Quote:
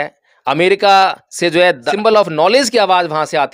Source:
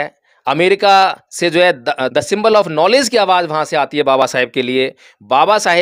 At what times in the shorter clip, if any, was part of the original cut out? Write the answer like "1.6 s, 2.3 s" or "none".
1.9 s